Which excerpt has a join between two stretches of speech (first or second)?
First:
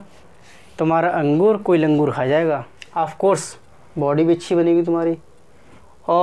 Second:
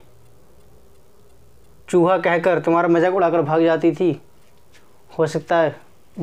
first